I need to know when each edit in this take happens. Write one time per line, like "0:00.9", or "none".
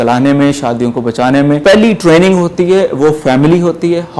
0:01.6